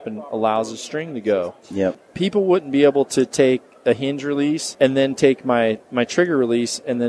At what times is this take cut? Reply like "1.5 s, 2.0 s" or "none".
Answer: 2.1 s, 4.7 s, 5.8 s